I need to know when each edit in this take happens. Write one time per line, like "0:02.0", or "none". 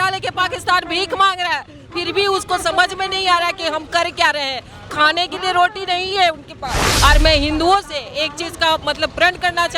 0:06.8